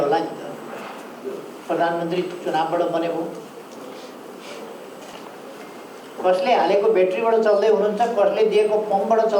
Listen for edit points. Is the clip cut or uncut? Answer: cut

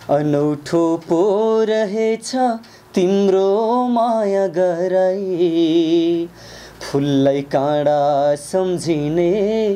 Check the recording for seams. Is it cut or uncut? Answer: uncut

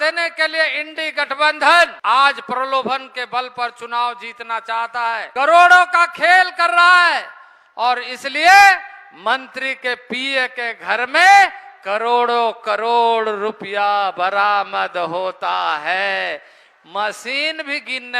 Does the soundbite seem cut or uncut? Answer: cut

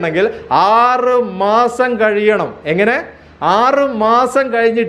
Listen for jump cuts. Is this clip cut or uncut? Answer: uncut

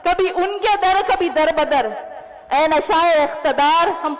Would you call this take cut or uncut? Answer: uncut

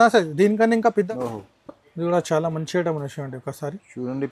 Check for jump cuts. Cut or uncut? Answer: cut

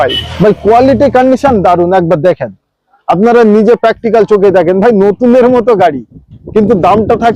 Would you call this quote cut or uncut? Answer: uncut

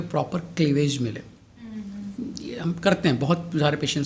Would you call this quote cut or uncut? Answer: uncut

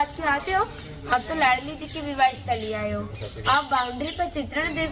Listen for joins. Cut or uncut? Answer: uncut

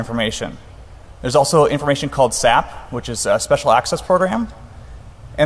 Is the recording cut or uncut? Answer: uncut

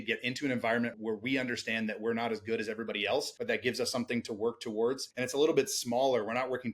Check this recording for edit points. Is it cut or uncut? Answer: cut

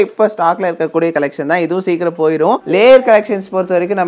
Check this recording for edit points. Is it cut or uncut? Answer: cut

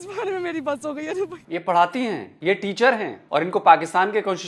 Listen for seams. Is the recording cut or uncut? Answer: cut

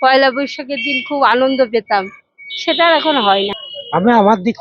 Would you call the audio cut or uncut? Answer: cut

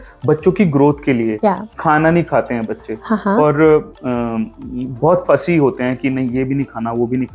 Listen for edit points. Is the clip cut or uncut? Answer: uncut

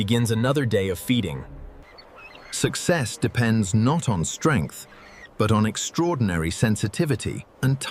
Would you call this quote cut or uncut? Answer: uncut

